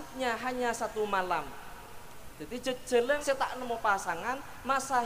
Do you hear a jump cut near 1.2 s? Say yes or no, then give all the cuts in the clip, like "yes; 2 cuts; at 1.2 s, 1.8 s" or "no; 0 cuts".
no; 1 cut; at 3.2 s